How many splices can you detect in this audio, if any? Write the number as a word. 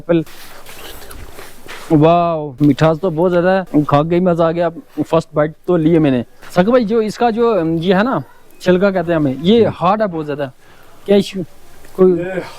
one